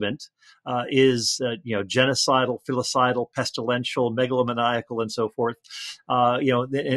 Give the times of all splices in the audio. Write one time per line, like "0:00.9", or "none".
none